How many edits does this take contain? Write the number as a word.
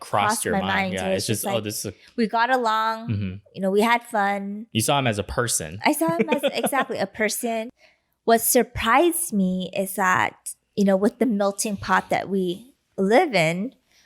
one